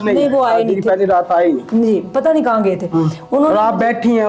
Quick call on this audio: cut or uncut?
uncut